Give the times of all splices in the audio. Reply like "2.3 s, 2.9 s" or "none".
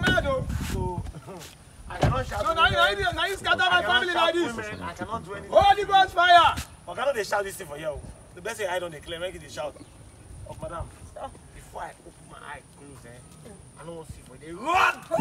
none